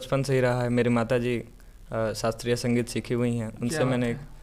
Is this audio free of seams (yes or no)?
yes